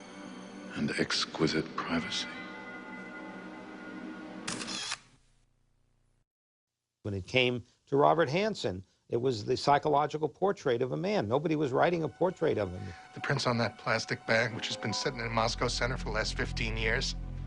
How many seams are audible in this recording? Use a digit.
1